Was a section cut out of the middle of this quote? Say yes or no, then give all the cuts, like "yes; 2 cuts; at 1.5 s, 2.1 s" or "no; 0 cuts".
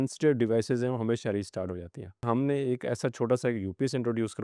yes; 1 cut; at 2.2 s